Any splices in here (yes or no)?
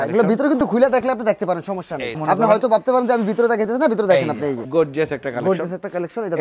yes